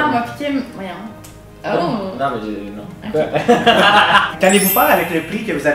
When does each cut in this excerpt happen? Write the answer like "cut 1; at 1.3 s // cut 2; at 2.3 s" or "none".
cut 1; at 4.3 s